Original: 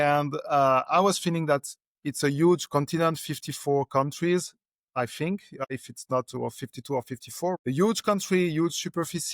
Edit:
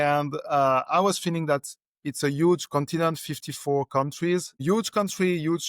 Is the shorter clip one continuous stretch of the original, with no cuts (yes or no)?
no